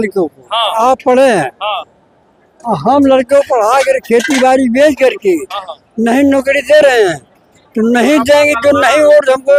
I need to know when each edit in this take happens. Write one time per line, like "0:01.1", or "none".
none